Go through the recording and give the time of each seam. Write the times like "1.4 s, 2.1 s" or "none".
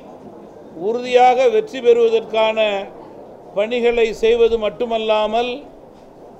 none

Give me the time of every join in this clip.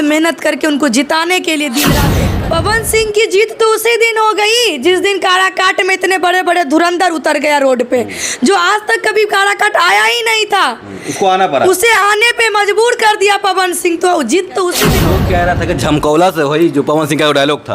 2.0 s, 15.0 s

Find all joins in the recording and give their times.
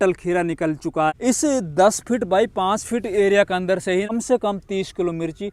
1.1 s, 4.1 s

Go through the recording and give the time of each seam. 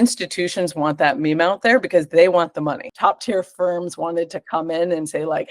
2.9 s

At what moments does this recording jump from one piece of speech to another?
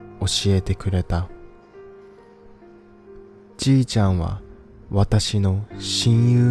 1.2 s, 3.5 s

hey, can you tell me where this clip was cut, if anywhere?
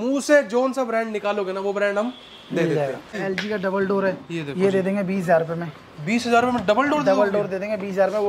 3.2 s

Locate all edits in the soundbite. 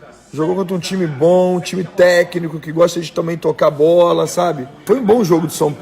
4.8 s

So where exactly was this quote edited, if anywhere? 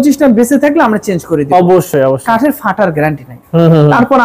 none

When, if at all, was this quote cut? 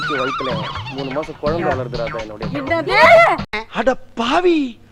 none

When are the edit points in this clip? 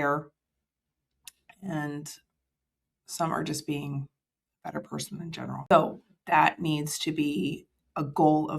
5.7 s

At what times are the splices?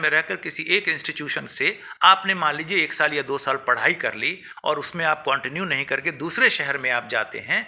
none

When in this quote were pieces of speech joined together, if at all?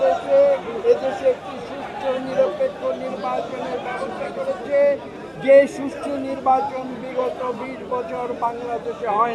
none

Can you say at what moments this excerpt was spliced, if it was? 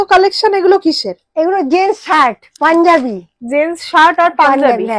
none

